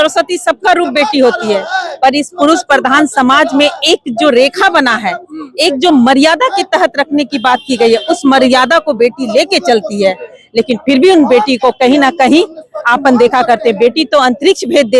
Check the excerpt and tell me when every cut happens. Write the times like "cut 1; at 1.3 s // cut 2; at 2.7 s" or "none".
none